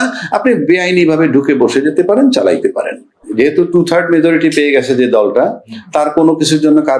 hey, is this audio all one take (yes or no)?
no